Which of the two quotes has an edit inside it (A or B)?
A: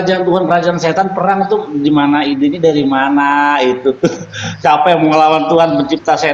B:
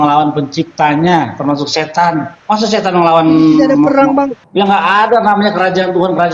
B